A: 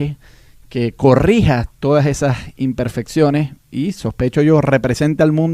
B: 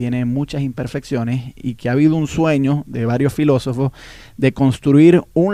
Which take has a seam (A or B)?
A